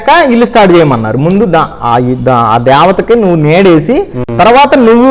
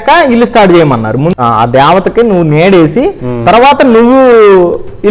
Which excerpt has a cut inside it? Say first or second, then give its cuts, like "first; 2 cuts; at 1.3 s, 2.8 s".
second; 1 cut; at 1.4 s